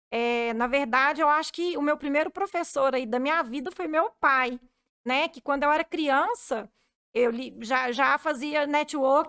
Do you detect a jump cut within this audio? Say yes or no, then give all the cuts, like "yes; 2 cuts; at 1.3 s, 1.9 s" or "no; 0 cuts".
no; 0 cuts